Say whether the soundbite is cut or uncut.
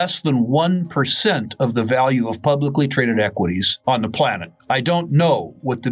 cut